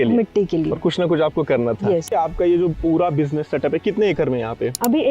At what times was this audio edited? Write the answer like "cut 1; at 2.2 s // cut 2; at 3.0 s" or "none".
cut 1; at 2.1 s